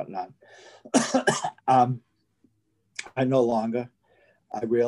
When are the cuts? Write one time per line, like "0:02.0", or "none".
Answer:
none